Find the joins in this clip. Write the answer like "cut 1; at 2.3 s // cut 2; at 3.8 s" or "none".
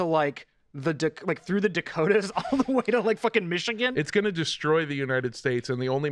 cut 1; at 3.9 s